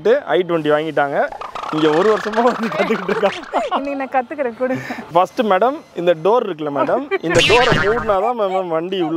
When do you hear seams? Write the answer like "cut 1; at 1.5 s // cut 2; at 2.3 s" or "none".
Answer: none